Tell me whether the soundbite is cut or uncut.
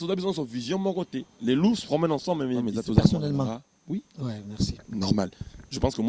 cut